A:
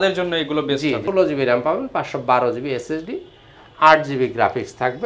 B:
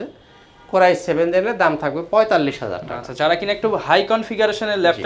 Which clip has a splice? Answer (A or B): A